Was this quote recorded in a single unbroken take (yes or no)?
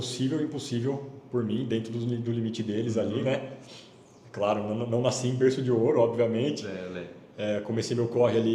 yes